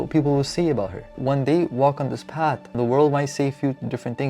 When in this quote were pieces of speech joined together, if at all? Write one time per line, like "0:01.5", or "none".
0:01.1
0:02.7